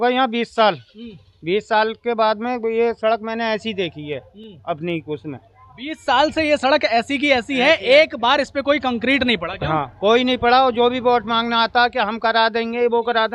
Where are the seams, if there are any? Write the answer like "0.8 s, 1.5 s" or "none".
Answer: none